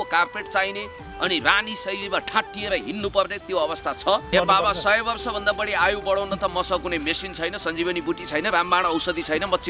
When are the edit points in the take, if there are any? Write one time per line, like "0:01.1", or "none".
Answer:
0:04.3